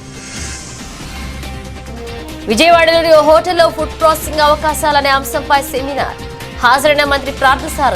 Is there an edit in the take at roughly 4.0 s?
no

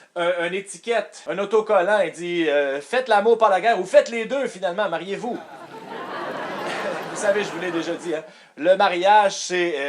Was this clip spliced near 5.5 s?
yes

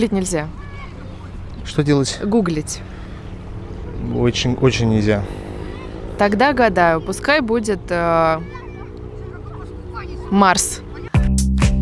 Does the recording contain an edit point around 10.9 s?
yes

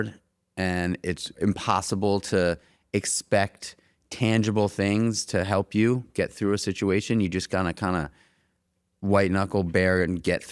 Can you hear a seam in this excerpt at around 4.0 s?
no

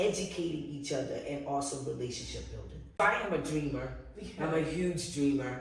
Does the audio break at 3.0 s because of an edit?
yes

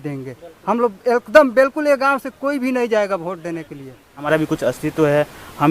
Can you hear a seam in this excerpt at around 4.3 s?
yes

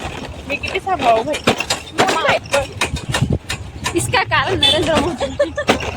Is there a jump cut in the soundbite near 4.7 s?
no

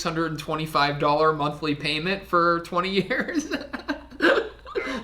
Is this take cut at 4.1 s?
no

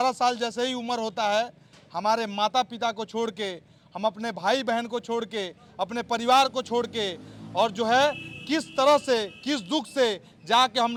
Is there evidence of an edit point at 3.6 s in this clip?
no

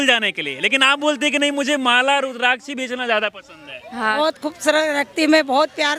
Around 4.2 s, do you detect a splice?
yes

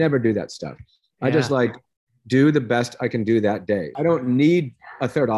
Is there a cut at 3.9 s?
yes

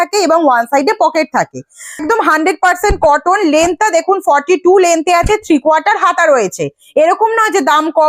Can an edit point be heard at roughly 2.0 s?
yes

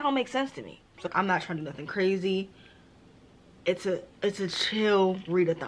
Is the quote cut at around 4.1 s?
no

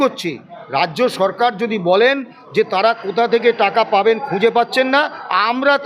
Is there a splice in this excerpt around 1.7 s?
no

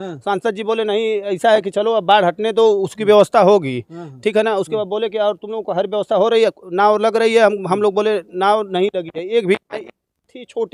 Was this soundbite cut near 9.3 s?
no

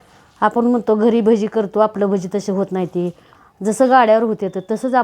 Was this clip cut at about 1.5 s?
no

